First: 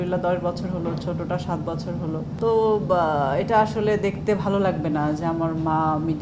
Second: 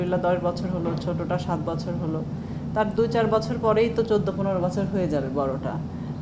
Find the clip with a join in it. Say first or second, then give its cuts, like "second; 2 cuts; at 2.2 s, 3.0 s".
first; 1 cut; at 2.3 s